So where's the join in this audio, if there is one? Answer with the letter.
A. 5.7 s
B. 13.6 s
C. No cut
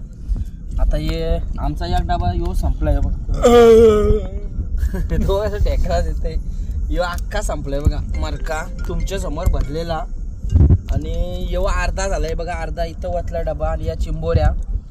C